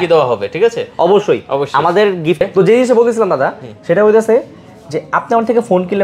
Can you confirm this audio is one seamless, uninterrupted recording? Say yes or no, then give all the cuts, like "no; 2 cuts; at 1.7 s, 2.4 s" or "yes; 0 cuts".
no; 1 cut; at 2.4 s